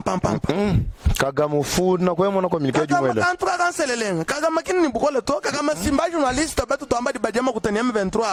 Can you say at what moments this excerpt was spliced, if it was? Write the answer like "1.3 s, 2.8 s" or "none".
none